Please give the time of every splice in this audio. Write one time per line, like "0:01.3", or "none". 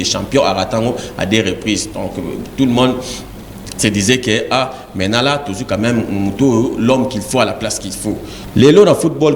0:08.3